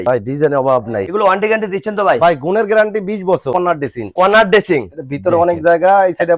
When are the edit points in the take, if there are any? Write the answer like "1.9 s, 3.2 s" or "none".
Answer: 1.1 s, 3.5 s